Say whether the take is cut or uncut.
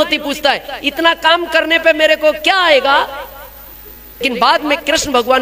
cut